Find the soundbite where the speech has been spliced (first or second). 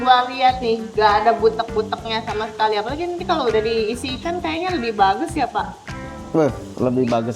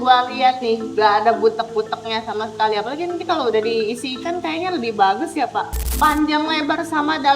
second